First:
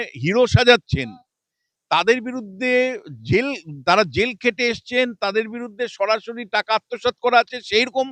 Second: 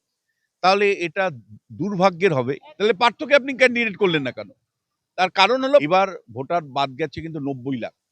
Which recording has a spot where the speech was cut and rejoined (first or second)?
second